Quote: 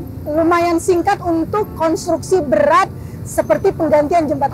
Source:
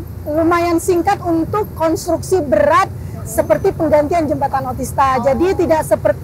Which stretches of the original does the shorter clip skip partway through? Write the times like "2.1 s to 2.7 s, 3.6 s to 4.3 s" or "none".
none